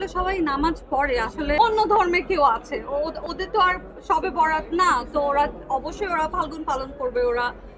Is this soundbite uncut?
no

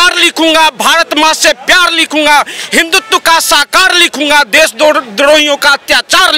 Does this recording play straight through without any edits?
yes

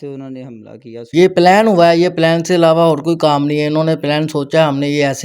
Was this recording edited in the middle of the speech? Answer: yes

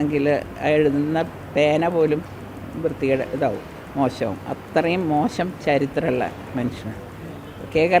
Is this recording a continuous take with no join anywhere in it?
yes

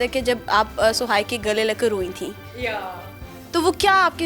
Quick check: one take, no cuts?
yes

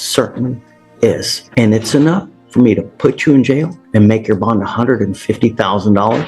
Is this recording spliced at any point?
yes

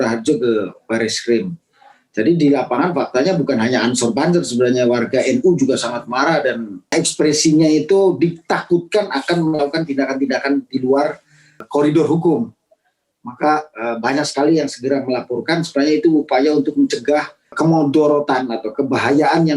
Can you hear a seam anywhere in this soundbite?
yes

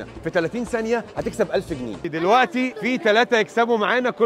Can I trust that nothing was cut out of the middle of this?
no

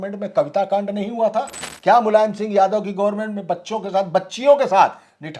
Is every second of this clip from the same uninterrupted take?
yes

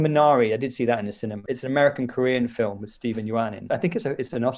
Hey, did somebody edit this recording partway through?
yes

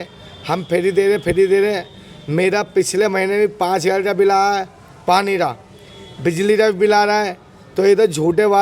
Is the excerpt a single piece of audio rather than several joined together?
yes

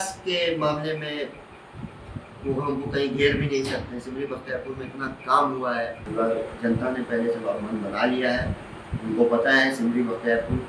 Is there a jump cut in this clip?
yes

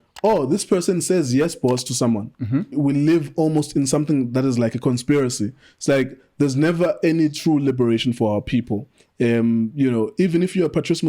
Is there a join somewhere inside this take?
yes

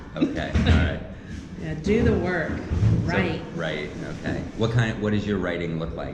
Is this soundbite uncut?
yes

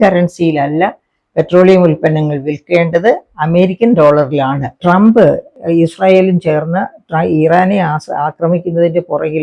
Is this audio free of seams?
no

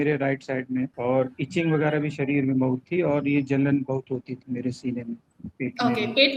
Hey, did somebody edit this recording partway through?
yes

